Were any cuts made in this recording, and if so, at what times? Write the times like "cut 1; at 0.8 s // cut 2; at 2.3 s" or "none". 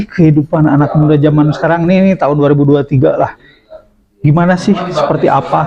none